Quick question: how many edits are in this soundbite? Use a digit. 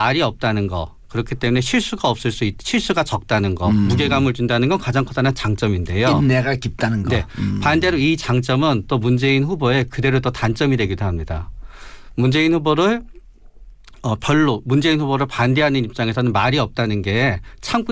0